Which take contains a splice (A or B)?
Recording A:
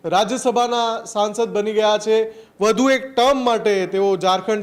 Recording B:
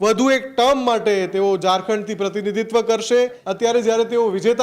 B